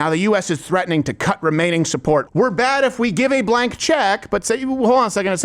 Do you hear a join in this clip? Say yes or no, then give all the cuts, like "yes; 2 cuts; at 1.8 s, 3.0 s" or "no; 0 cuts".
yes; 1 cut; at 2.3 s